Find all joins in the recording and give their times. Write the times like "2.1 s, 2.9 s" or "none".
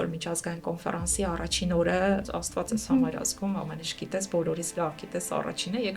2.4 s